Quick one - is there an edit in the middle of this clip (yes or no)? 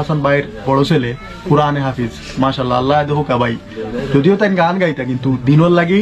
no